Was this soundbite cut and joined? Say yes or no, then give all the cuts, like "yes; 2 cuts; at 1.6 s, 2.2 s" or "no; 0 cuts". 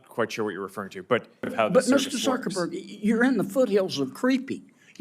yes; 1 cut; at 1.5 s